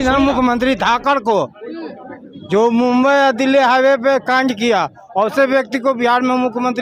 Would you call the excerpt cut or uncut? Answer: uncut